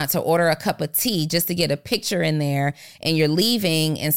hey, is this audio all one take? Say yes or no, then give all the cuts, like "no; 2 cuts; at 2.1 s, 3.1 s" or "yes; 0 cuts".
yes; 0 cuts